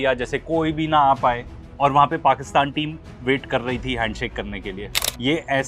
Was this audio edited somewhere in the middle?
no; 0 cuts

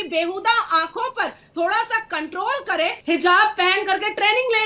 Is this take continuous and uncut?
no; 1 cut; at 3.0 s

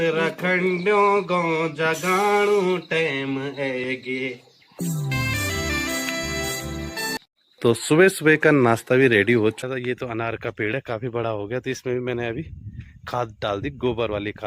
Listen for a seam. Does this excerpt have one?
yes; 2 cuts; at 7.2 s, 9.6 s

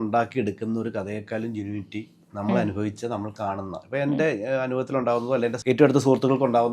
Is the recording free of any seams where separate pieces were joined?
no; 1 cut; at 5.6 s

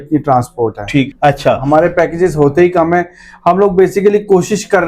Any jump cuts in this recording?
yes; 1 cut; at 1.1 s

